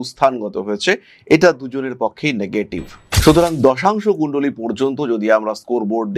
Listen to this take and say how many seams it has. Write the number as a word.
one